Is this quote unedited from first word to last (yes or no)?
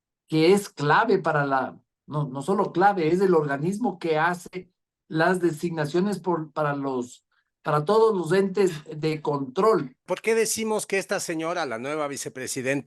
no